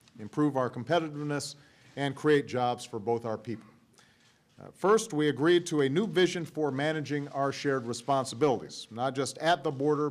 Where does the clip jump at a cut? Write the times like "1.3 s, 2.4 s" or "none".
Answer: 2.7 s